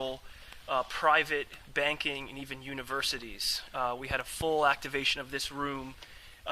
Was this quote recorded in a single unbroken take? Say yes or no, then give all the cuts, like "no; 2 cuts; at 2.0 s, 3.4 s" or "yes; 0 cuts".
no; 1 cut; at 2.5 s